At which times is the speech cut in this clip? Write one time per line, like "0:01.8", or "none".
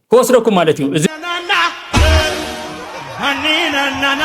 0:01.1

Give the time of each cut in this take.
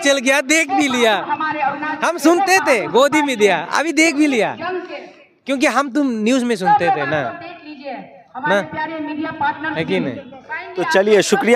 none

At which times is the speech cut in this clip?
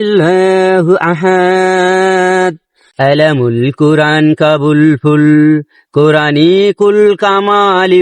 0:02.8

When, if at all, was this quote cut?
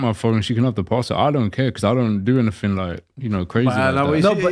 none

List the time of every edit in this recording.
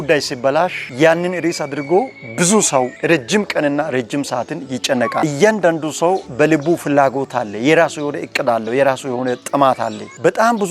0:03.0
0:05.2
0:06.3

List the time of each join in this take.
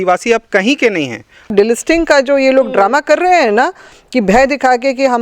0:01.5

